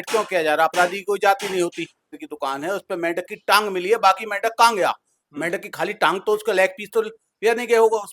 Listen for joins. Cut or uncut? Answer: cut